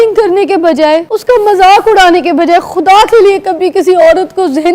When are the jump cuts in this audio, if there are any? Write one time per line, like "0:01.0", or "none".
0:01.1